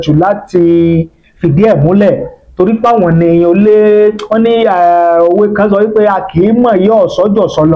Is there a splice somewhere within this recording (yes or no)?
no